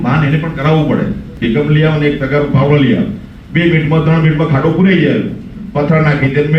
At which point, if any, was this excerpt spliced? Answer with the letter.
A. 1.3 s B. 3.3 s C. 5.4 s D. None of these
A